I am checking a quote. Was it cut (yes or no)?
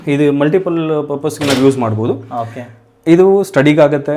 no